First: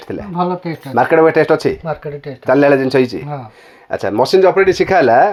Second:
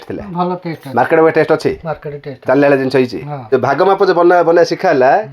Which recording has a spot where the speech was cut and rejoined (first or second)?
second